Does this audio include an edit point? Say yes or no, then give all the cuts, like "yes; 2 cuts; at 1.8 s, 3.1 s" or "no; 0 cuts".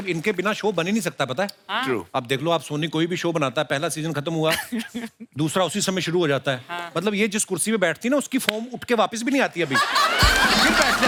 no; 0 cuts